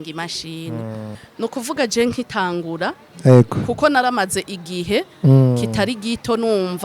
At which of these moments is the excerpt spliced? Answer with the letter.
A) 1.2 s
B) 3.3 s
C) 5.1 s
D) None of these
A